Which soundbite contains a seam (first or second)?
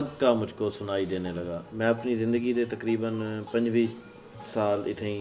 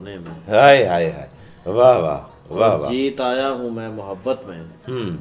first